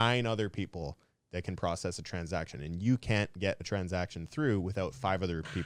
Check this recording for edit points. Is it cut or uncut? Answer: uncut